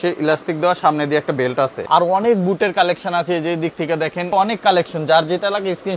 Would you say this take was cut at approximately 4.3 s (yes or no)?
yes